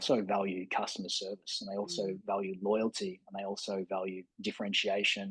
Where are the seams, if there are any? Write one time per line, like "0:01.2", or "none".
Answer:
none